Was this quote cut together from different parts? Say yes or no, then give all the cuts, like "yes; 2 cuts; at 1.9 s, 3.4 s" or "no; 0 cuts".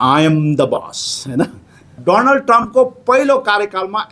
yes; 1 cut; at 2.0 s